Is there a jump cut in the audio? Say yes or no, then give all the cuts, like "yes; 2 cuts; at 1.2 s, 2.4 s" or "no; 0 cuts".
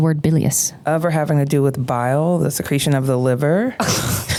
no; 0 cuts